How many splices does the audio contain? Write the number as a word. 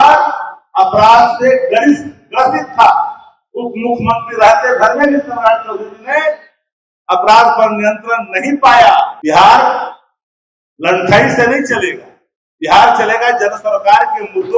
one